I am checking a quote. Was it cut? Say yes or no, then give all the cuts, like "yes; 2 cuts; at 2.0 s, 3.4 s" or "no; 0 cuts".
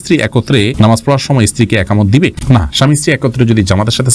no; 0 cuts